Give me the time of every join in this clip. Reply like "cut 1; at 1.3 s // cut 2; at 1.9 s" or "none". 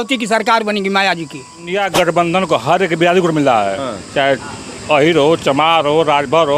cut 1; at 1.7 s